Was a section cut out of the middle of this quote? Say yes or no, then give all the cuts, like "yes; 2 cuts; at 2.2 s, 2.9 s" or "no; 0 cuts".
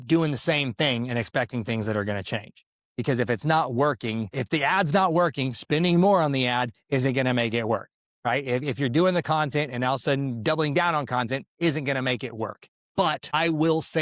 yes; 2 cuts; at 4.3 s, 12.9 s